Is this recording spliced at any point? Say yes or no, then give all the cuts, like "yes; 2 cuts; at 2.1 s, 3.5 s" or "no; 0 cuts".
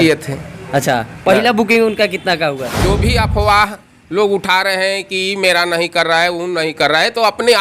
yes; 1 cut; at 2.7 s